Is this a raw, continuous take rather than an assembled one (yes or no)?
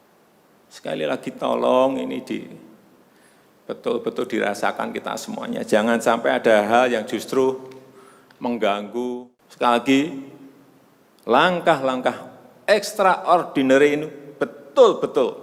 yes